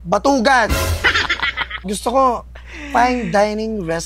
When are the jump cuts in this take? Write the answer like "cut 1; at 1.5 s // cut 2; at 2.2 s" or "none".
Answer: cut 1; at 1.7 s